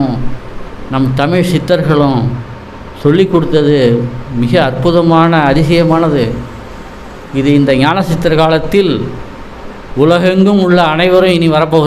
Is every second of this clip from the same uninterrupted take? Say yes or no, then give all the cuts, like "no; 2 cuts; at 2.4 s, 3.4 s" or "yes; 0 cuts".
yes; 0 cuts